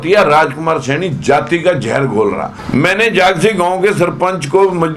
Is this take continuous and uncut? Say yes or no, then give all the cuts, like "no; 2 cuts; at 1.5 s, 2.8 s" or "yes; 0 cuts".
no; 1 cut; at 2.5 s